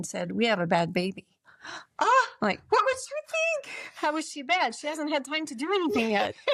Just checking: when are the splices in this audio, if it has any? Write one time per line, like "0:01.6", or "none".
none